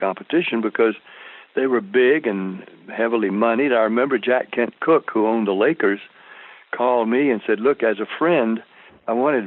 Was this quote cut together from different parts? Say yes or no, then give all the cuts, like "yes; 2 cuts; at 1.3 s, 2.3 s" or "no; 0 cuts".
no; 0 cuts